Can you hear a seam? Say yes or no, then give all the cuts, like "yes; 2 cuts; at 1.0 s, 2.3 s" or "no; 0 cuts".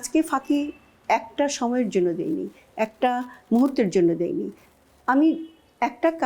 no; 0 cuts